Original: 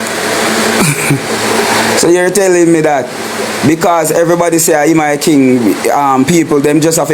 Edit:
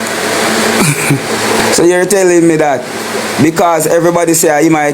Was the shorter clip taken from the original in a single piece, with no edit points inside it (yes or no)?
no